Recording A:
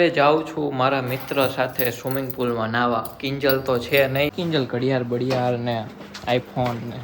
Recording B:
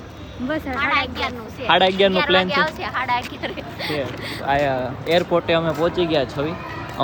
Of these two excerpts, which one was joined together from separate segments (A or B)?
A